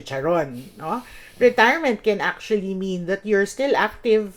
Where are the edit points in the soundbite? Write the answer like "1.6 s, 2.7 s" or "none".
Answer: none